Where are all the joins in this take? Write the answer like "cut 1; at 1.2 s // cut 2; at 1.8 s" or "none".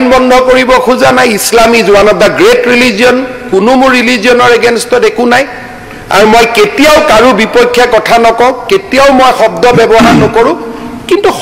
none